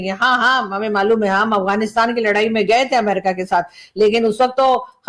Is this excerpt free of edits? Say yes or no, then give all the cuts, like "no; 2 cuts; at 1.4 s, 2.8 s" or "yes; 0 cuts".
yes; 0 cuts